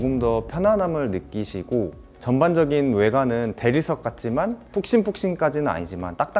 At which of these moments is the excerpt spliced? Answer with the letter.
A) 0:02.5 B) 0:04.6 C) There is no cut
B